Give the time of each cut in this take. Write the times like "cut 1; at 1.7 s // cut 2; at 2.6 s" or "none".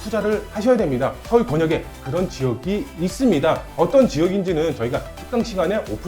cut 1; at 1.2 s